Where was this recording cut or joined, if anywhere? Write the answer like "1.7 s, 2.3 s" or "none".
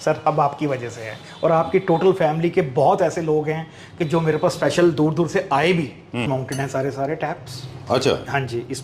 6.3 s